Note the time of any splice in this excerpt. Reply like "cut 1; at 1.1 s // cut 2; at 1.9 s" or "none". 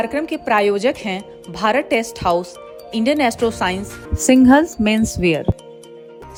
none